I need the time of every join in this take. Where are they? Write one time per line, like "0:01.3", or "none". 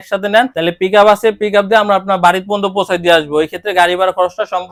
none